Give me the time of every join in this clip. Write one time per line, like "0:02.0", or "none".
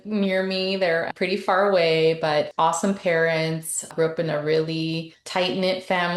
0:01.1
0:02.5
0:03.9
0:05.1